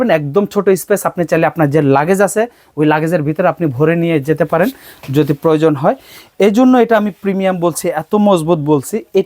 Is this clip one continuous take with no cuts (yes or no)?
yes